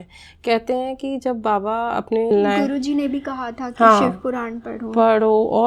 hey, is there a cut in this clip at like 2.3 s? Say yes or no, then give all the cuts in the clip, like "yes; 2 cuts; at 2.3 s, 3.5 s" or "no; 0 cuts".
yes; 1 cut; at 2.3 s